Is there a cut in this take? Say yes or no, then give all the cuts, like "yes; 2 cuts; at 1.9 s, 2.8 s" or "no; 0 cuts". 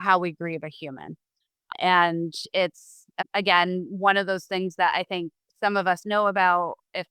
yes; 2 cuts; at 1.7 s, 3.1 s